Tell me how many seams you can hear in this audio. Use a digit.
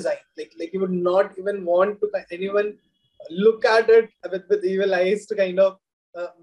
1